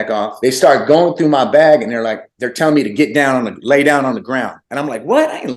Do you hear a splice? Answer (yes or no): no